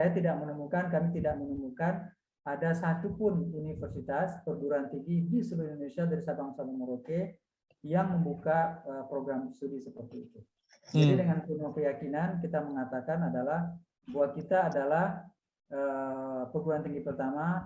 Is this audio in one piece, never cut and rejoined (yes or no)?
yes